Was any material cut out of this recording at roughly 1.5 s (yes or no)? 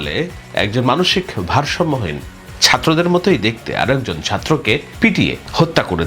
no